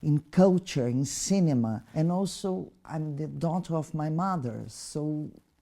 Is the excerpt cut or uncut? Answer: cut